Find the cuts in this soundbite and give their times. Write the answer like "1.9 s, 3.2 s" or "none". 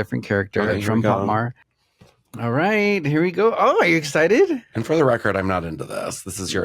1.6 s

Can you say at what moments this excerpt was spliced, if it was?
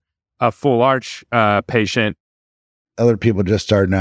2.2 s

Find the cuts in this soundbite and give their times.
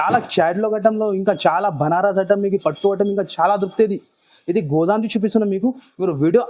none

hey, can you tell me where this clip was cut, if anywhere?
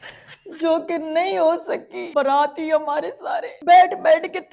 1.9 s, 3.5 s

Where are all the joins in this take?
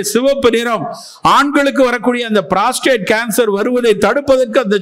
none

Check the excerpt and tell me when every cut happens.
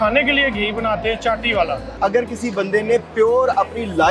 2.0 s

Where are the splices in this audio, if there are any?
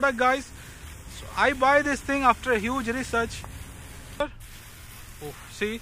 4.2 s

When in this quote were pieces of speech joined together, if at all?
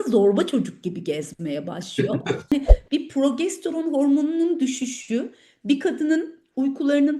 2.5 s

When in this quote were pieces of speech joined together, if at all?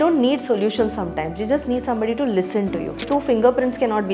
3.0 s

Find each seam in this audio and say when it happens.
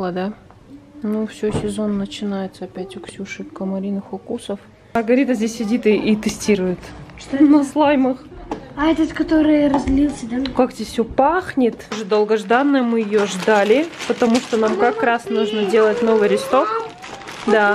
5.0 s, 12.0 s

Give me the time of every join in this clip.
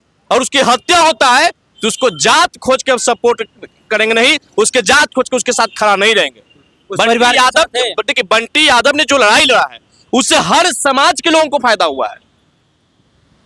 none

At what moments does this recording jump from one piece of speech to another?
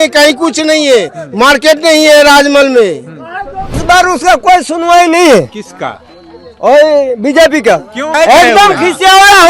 3.8 s

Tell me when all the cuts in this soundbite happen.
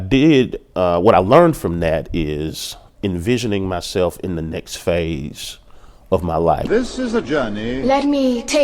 6.6 s

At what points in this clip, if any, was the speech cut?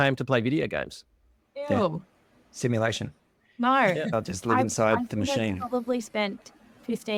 none

